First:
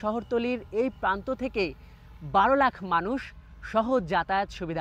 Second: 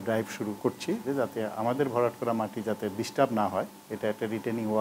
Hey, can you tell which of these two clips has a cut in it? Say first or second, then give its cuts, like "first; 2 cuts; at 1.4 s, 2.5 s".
second; 1 cut; at 1.0 s